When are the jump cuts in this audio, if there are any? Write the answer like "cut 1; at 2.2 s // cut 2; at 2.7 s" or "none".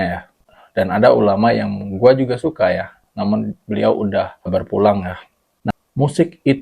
cut 1; at 5.7 s